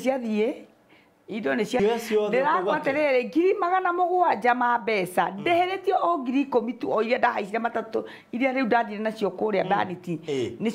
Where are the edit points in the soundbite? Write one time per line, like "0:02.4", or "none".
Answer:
0:01.8